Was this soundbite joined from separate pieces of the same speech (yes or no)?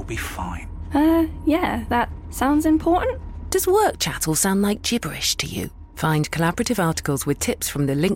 no